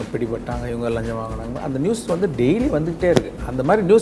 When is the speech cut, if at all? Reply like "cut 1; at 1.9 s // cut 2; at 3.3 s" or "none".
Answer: none

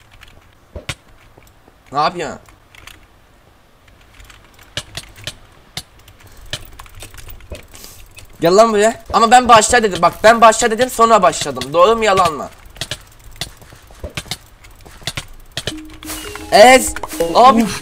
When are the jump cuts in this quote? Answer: cut 1; at 9.0 s

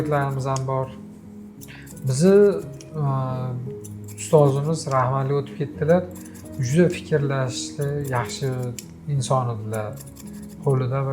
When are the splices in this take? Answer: none

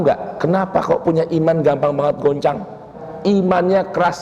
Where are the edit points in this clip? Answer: cut 1; at 3.0 s

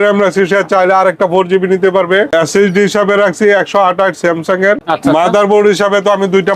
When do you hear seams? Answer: cut 1; at 2.3 s // cut 2; at 4.8 s

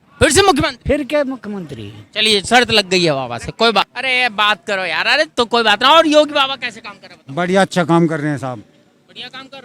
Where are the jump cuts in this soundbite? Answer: cut 1; at 3.9 s

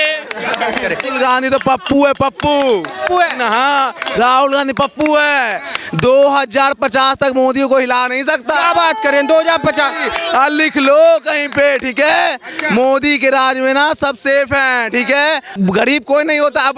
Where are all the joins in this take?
cut 1; at 1.1 s // cut 2; at 15.5 s

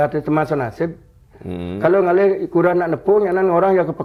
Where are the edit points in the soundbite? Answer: none

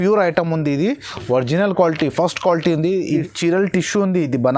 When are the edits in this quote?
cut 1; at 3.1 s

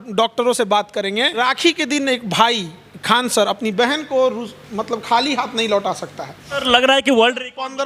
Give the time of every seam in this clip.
cut 1; at 1.4 s // cut 2; at 6.6 s

